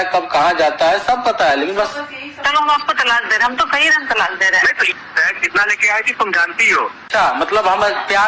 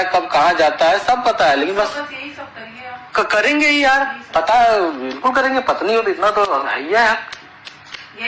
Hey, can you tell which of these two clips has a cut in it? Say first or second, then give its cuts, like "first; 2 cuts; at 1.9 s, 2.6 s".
first; 3 cuts; at 2.4 s, 4.9 s, 7.1 s